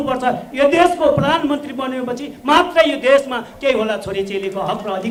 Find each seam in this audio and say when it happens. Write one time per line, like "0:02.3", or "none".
none

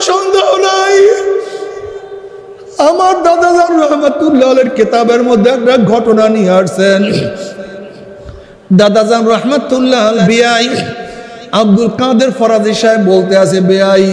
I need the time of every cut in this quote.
0:10.2

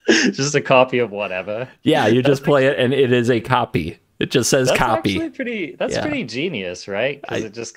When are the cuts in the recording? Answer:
none

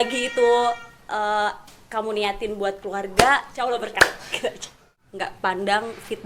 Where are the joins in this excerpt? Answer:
0:03.8
0:05.0

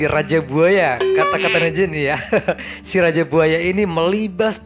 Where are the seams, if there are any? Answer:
none

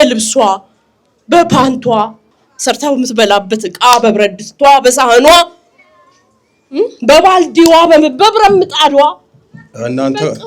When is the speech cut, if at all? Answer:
none

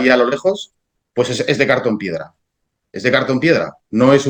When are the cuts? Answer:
none

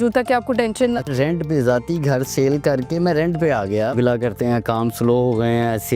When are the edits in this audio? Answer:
0:01.1
0:03.9

